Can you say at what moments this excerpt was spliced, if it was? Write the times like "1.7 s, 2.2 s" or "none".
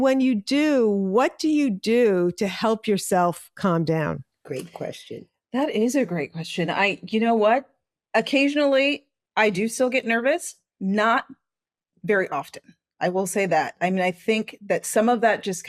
none